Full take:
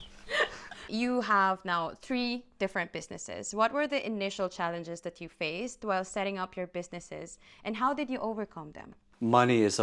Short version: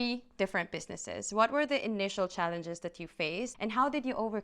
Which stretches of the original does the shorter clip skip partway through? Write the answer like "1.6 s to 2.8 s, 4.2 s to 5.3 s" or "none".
5.7 s to 7.6 s